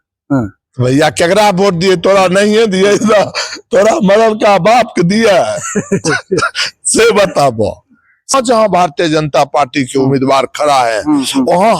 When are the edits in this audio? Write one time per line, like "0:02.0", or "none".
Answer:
0:08.3